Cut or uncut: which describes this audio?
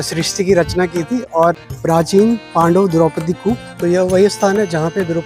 cut